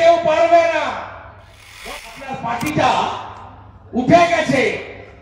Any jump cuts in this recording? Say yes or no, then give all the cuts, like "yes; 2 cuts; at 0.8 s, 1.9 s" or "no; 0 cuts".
yes; 1 cut; at 1.9 s